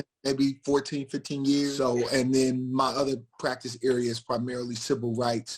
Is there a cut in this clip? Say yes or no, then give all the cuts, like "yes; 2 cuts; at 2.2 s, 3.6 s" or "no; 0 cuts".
yes; 1 cut; at 1.7 s